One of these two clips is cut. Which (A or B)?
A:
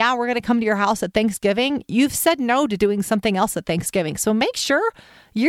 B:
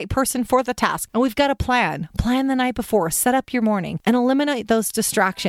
B